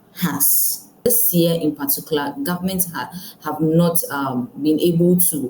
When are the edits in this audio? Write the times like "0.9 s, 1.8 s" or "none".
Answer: 1.0 s

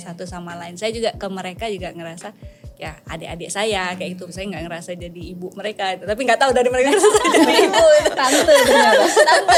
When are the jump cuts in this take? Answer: none

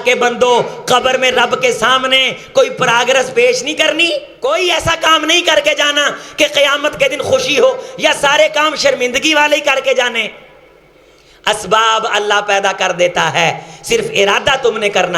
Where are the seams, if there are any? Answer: 4.3 s

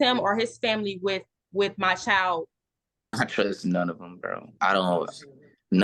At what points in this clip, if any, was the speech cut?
3.1 s

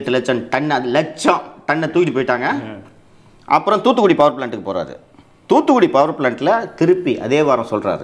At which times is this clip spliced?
none

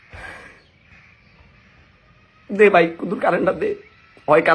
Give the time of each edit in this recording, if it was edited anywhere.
0.9 s

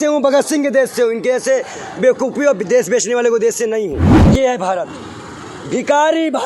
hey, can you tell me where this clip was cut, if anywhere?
4.1 s

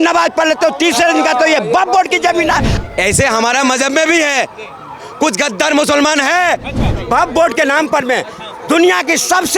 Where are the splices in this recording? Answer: 2.7 s, 6.9 s

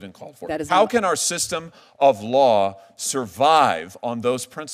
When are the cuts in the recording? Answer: none

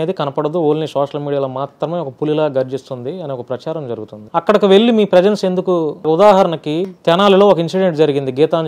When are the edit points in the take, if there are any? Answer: 4.1 s, 6.0 s, 6.9 s

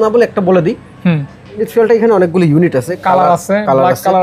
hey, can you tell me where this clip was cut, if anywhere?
1.7 s

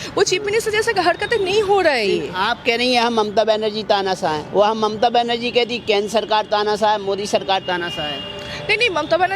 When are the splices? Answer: none

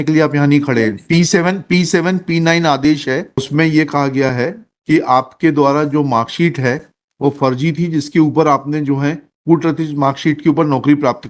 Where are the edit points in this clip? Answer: 3.5 s

